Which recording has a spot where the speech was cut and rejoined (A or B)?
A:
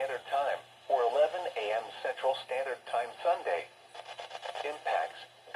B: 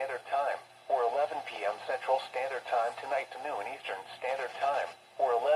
B